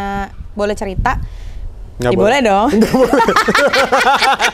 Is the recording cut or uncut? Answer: uncut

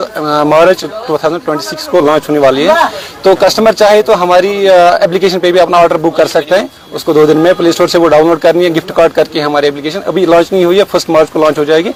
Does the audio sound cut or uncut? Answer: uncut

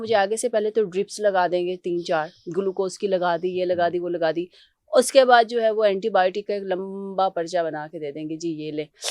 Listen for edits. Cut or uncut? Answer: uncut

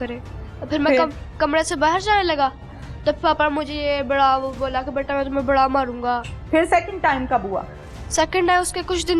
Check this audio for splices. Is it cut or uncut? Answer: cut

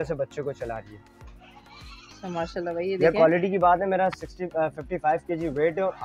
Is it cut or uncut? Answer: uncut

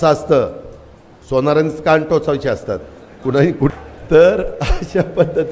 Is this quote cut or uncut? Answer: cut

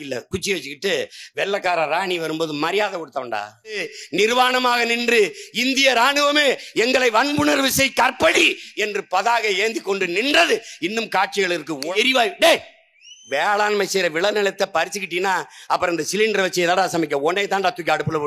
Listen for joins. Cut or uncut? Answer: cut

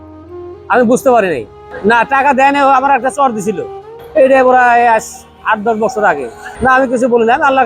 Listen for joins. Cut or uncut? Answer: cut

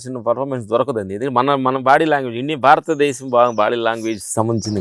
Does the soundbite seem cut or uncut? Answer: uncut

